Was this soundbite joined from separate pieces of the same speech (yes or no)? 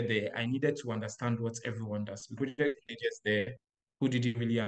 yes